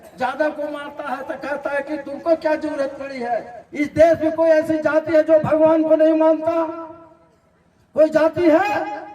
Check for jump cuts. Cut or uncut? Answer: cut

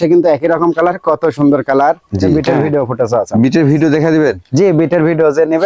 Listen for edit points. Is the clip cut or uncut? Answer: cut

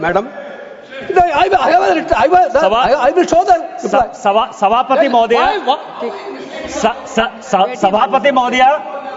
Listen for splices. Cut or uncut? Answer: uncut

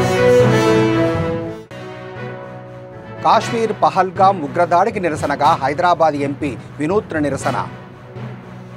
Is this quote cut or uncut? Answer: cut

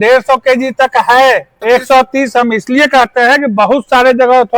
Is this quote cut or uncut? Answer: cut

